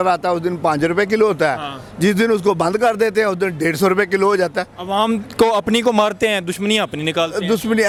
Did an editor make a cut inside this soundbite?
no; 0 cuts

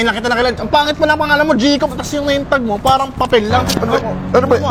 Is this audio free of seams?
yes; 0 cuts

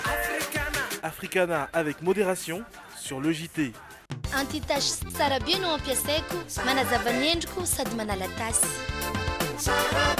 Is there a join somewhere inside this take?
yes; 1 cut; at 4.0 s

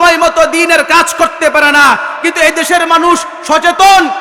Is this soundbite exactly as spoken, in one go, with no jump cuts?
yes; 0 cuts

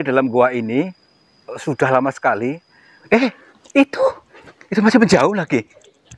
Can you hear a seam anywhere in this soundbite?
yes; 1 cut; at 3.0 s

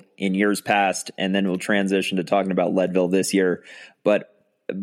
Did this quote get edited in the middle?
no; 0 cuts

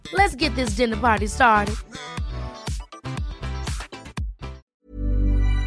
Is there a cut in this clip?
yes; 1 cut; at 4.6 s

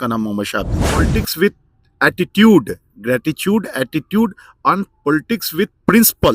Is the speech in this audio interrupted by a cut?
yes; 1 cut; at 1.1 s

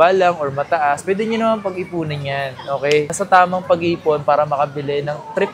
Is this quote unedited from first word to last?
yes; 0 cuts

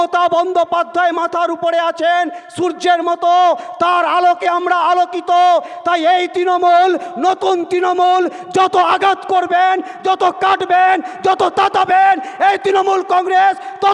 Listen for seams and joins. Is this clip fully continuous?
yes; 0 cuts

